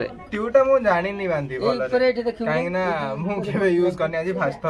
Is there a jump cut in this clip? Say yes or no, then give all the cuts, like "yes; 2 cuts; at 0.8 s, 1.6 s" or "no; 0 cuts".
no; 0 cuts